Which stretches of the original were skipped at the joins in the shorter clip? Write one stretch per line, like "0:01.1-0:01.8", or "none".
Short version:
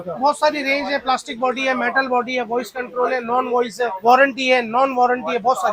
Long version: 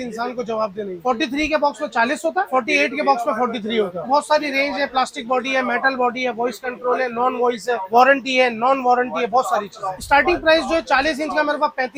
none